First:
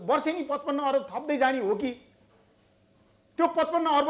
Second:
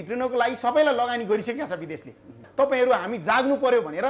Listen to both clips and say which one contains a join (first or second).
second